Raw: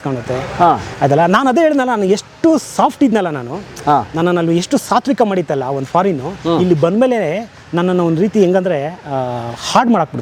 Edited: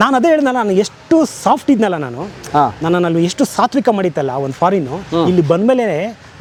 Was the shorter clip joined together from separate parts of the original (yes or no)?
no